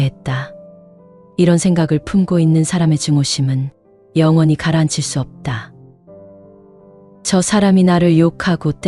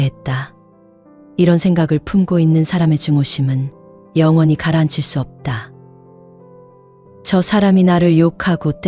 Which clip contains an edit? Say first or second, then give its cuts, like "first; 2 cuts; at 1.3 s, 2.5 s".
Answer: first; 2 cuts; at 5.7 s, 7.2 s